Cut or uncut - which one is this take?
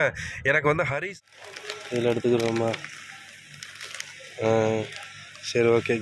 cut